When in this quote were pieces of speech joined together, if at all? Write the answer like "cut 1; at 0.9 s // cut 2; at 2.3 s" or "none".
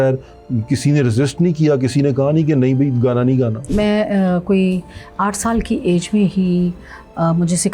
cut 1; at 3.7 s

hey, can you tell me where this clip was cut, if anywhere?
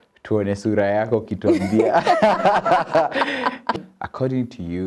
cut 1; at 3.8 s

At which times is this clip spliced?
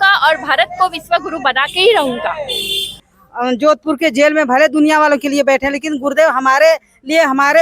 cut 1; at 3.1 s

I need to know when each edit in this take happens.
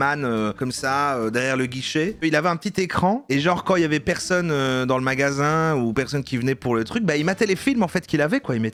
none

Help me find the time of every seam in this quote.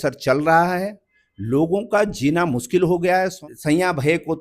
cut 1; at 3.4 s

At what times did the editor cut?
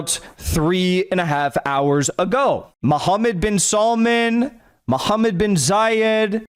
cut 1; at 2.7 s

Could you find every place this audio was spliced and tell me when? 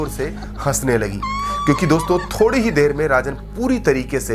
none

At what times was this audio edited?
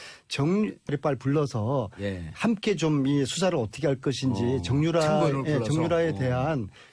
none

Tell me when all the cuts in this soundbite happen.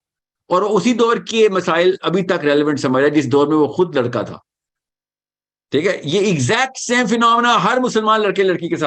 none

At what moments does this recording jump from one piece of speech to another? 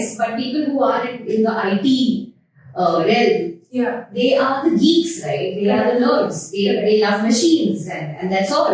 none

